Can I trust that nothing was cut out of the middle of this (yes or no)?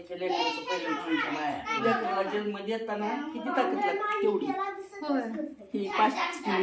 no